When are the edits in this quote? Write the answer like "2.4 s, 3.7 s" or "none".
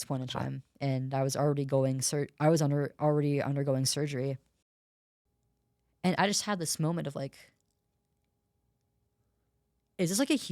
4.7 s